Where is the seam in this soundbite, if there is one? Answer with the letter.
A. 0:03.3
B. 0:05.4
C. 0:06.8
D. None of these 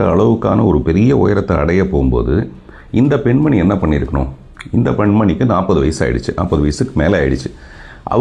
D